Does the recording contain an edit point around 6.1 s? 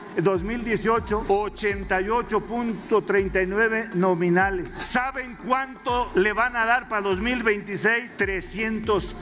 yes; 4 cuts; at 1.2 s, 4.8 s, 6.1 s, 8.1 s

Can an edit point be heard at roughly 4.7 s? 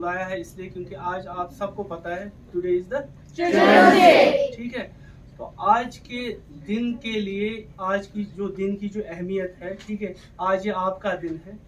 no; 0 cuts

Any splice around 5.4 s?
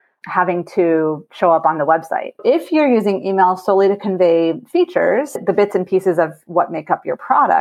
yes; 2 cuts; at 2.4 s, 5.4 s

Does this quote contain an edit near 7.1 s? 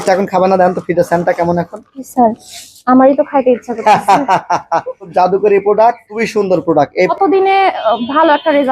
yes; 1 cut; at 7.1 s

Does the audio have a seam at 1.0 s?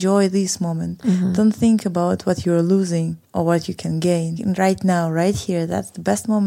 no; 2 cuts; at 3.2 s, 4.3 s

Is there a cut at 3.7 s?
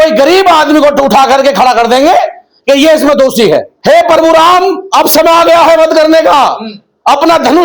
yes; 1 cut; at 3.7 s

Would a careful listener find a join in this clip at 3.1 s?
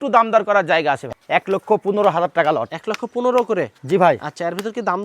no; 1 cut; at 1.0 s

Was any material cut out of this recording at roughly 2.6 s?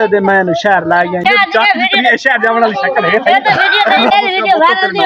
no; 2 cuts; at 1.2 s, 4.1 s

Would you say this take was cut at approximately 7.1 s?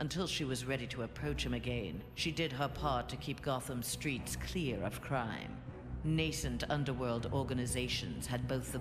yes; 1 cut; at 7.1 s

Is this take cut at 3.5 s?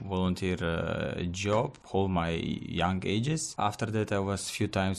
yes; 2 cuts; at 1.8 s, 3.5 s

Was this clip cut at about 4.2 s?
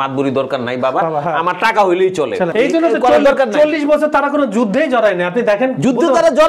no; 1 cut; at 2.5 s

